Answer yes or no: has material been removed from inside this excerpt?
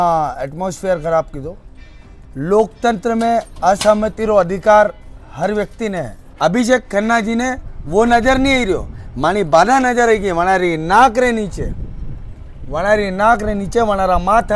yes